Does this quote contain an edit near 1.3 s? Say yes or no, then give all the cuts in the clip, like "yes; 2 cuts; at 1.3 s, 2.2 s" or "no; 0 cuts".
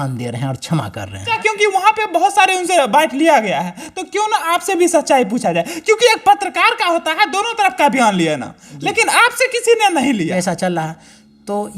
yes; 2 cuts; at 1.3 s, 10.3 s